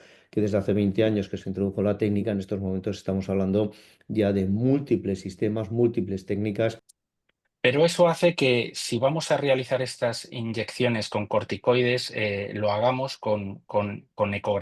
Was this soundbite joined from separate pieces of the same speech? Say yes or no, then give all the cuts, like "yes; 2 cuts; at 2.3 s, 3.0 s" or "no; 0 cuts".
yes; 1 cut; at 6.9 s